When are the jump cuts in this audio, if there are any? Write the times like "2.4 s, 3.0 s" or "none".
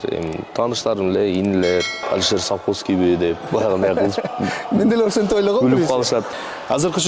2.0 s, 6.3 s